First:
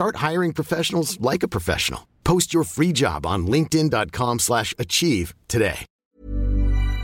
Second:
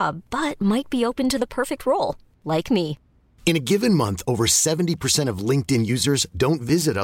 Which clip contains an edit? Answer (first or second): first